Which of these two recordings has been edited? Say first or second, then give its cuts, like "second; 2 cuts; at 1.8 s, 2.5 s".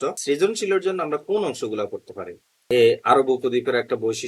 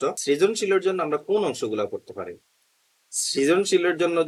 first; 1 cut; at 2.6 s